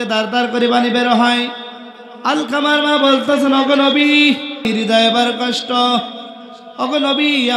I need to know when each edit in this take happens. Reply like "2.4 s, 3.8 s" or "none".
4.7 s